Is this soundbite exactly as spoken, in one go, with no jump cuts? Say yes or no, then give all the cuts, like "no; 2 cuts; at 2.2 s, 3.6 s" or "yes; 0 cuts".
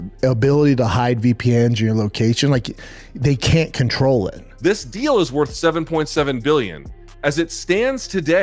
no; 1 cut; at 4.5 s